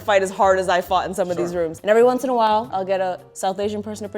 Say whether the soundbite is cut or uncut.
cut